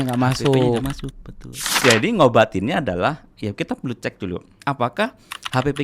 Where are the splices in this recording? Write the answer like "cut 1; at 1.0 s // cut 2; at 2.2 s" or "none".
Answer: cut 1; at 1.7 s

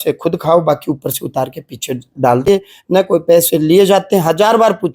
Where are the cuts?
cut 1; at 2.4 s

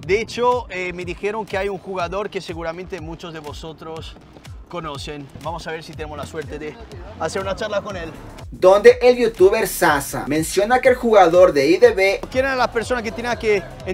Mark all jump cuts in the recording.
cut 1; at 8.4 s // cut 2; at 12.2 s

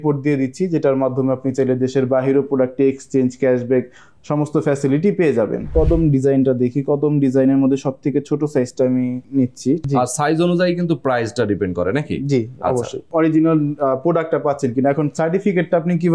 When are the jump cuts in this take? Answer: cut 1; at 5.7 s // cut 2; at 9.8 s // cut 3; at 13.0 s

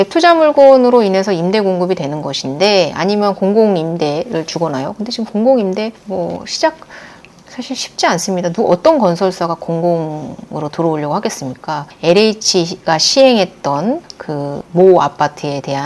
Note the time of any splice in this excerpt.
cut 1; at 12.0 s

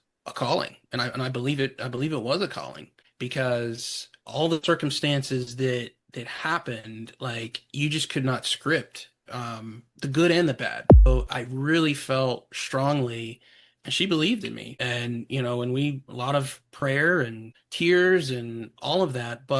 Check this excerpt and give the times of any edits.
cut 1; at 11.1 s

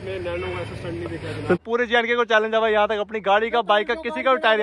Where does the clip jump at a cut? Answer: cut 1; at 1.6 s

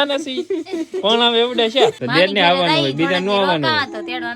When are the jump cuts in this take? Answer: cut 1; at 2.0 s

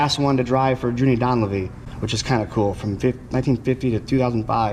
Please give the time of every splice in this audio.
none

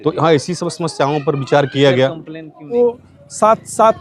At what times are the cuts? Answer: cut 1; at 2.8 s

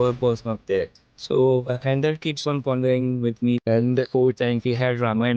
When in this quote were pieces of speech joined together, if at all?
cut 1; at 3.6 s

